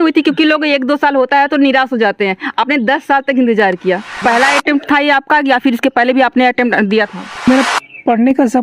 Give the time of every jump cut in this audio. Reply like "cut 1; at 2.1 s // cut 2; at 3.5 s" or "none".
cut 1; at 4.2 s // cut 2; at 7.4 s